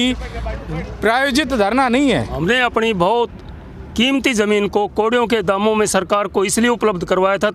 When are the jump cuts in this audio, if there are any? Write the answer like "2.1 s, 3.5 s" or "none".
2.3 s